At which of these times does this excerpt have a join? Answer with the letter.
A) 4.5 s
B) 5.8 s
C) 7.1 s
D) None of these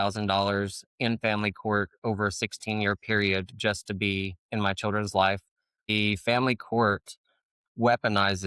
B